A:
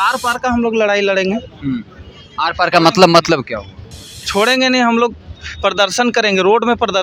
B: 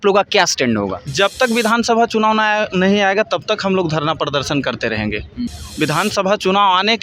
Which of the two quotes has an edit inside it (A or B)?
B